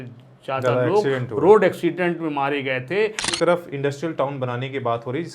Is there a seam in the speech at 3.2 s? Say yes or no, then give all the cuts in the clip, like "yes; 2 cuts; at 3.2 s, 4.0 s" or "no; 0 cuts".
yes; 1 cut; at 3.2 s